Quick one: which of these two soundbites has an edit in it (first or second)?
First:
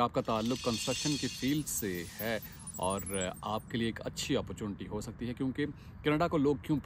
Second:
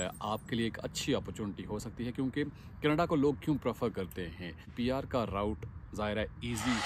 second